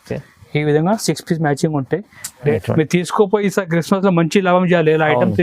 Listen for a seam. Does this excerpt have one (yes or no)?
yes